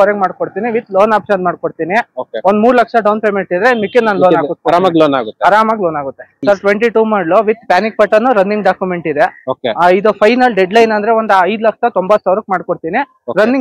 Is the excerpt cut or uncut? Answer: cut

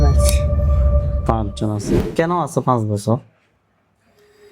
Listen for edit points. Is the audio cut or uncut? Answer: cut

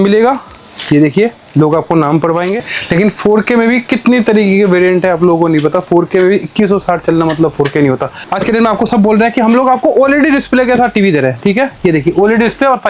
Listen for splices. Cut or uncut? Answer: cut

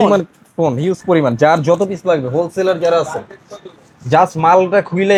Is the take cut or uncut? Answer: uncut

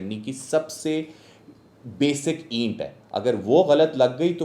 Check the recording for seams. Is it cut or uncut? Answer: uncut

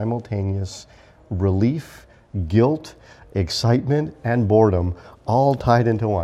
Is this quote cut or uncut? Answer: uncut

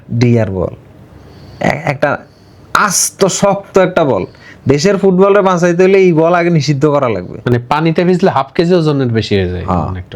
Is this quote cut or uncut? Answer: uncut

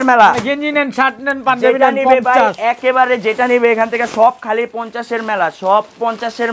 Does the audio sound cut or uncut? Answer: uncut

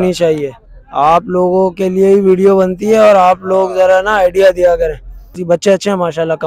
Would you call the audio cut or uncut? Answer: cut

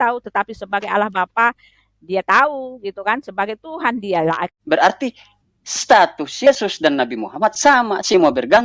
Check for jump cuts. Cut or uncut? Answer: cut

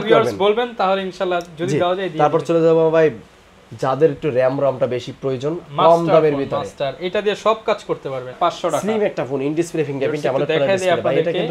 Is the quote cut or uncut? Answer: cut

